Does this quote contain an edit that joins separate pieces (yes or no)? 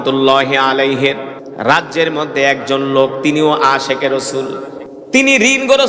yes